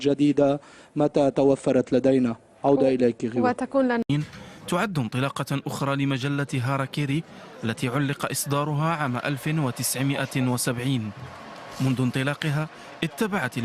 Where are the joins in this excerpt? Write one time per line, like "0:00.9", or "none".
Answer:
0:02.8